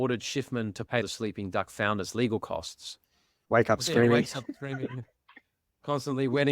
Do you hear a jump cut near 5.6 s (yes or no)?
no